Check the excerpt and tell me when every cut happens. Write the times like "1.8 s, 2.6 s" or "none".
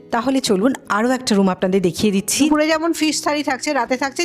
2.5 s